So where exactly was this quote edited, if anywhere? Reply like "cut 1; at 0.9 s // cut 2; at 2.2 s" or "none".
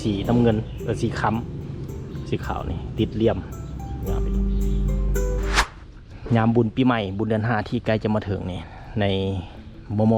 cut 1; at 5.6 s